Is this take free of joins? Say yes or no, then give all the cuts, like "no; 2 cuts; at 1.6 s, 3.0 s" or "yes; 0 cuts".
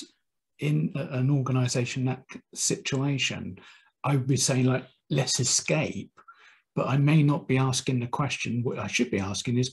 yes; 0 cuts